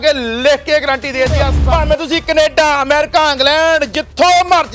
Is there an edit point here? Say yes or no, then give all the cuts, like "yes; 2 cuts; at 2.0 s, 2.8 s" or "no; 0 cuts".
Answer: yes; 1 cut; at 1.5 s